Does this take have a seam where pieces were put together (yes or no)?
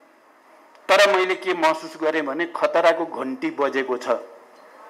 no